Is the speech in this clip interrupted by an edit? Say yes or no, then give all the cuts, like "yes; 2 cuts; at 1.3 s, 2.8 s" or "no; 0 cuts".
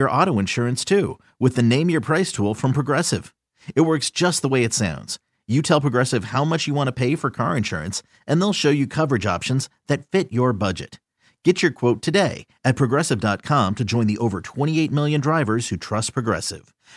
no; 0 cuts